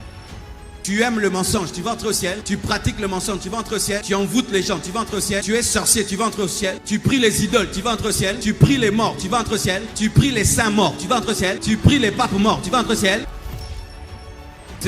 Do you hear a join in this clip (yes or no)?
yes